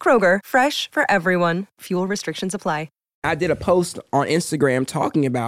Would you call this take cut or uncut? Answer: cut